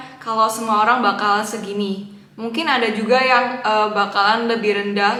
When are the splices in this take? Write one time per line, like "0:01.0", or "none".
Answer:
none